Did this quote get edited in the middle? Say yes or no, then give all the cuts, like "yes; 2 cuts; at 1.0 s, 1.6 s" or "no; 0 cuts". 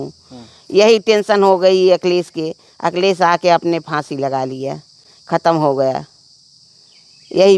no; 0 cuts